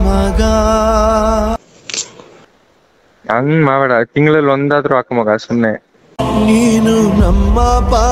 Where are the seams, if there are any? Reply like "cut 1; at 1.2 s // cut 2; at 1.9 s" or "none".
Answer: cut 1; at 2.4 s